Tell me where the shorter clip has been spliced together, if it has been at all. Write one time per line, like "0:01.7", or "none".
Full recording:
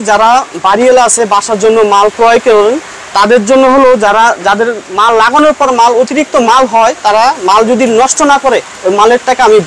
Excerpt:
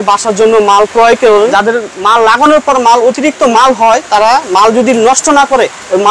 0:01.5